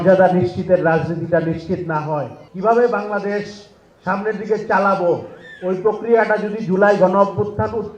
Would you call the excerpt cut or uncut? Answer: cut